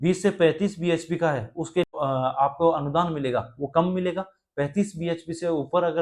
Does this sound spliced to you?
yes; 1 cut; at 1.9 s

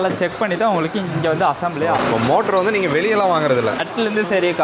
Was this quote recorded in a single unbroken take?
no; 2 cuts; at 2.0 s, 3.8 s

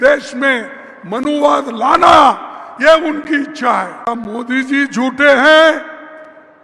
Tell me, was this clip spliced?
yes; 1 cut; at 4.1 s

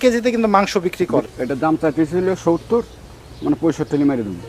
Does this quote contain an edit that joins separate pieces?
yes; 1 cut; at 1.3 s

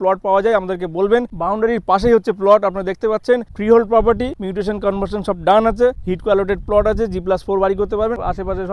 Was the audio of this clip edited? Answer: no; 0 cuts

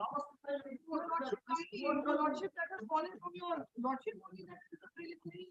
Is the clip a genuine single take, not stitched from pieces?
yes; 0 cuts

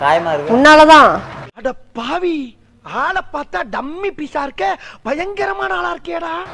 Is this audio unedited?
no; 1 cut; at 1.3 s

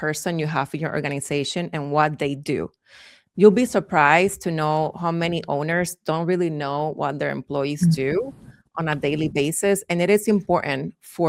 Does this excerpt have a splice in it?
no; 0 cuts

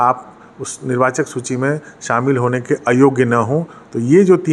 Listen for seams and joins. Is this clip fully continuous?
yes; 0 cuts

